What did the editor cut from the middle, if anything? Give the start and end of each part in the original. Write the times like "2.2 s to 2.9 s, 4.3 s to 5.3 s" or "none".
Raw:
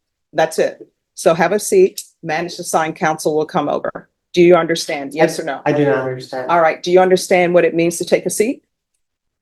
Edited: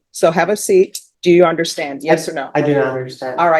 2.1 s to 4.2 s